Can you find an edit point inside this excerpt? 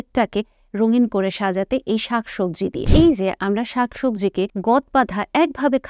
yes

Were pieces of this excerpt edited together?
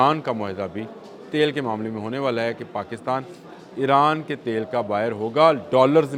no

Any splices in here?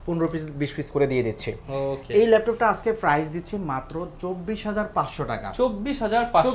no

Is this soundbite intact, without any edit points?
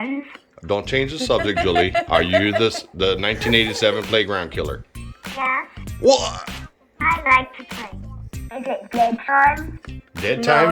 no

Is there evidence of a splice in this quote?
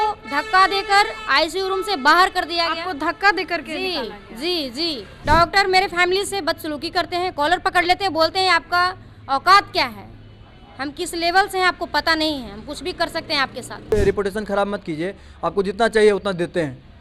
yes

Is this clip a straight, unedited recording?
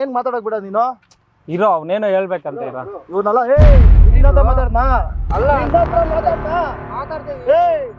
yes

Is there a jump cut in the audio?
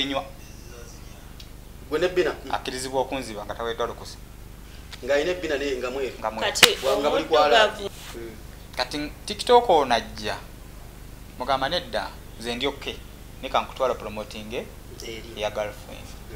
yes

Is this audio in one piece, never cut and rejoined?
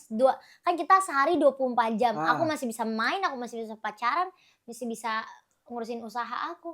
yes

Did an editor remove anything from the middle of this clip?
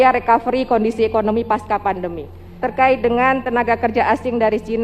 yes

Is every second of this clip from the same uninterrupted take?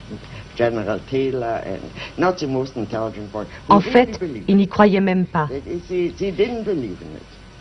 no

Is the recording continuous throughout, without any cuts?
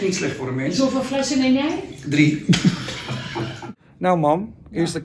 no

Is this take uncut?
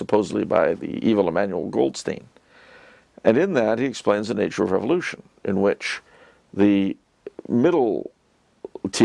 yes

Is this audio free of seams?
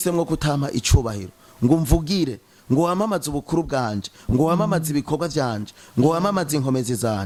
yes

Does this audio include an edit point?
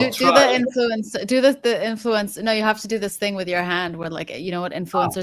no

